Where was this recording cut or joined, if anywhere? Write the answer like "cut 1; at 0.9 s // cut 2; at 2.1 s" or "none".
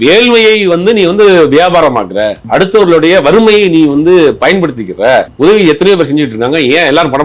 cut 1; at 2.4 s // cut 2; at 5.3 s

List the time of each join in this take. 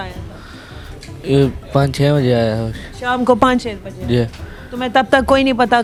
none

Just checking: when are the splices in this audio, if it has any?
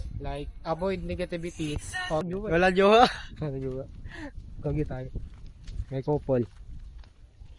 cut 1; at 2.2 s

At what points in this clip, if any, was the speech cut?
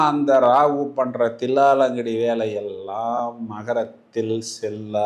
none

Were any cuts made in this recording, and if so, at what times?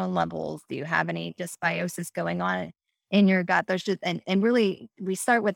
none

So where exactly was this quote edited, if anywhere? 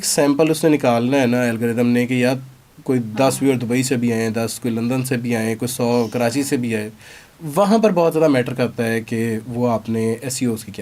none

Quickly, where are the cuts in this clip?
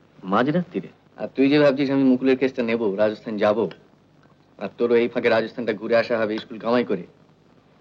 cut 1; at 1.0 s

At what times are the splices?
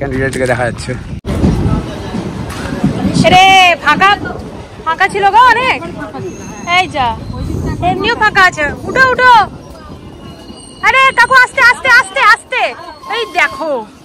cut 1; at 1.2 s

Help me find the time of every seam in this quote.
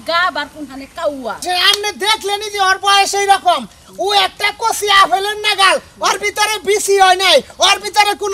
cut 1; at 1.4 s

